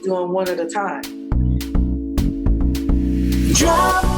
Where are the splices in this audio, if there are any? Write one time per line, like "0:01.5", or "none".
0:01.1